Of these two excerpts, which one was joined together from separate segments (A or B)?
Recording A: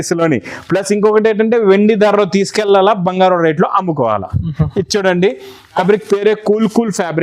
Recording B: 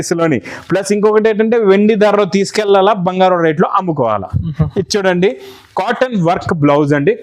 A